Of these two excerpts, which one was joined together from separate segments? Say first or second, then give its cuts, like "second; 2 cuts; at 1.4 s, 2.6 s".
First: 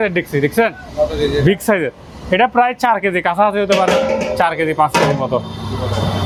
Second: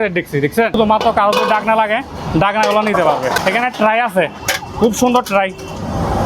second; 2 cuts; at 0.8 s, 3.4 s